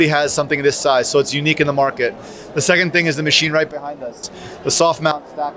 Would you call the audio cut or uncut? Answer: uncut